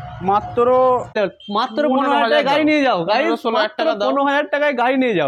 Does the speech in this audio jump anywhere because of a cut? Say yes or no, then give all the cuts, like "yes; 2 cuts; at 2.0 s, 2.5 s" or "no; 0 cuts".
yes; 1 cut; at 1.2 s